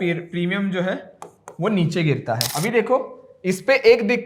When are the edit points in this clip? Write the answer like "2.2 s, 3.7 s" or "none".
2.5 s